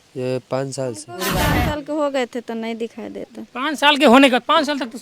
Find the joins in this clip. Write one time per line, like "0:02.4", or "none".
0:01.5